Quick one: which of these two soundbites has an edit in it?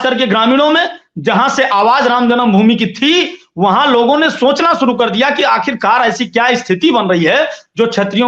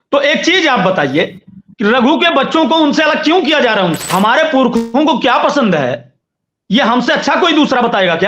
second; 1 cut; at 4.0 s

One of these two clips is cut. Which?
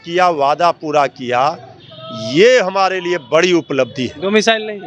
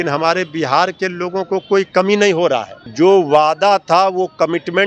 second; 1 cut; at 2.8 s

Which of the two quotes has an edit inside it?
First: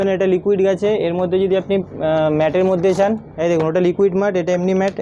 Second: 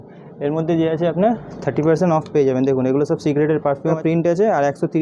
second; 1 cut; at 4.0 s

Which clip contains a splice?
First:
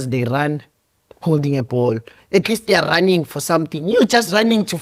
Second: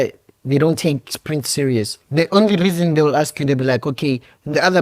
second; 1 cut; at 2.0 s

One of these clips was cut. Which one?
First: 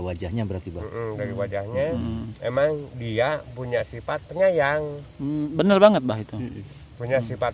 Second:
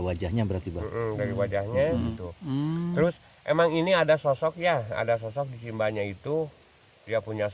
second; 1 cut; at 2.2 s

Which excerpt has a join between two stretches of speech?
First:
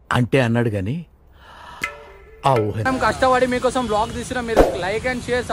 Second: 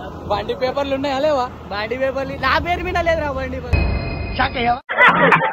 first; 1 cut; at 2.8 s

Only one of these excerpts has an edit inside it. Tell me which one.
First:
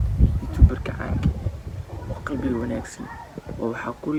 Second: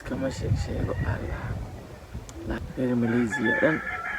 second; 1 cut; at 2.6 s

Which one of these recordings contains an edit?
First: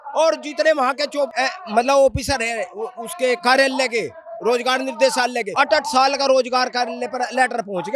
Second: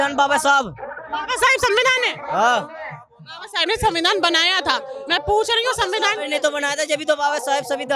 first; 2 cuts; at 1.3 s, 5.4 s

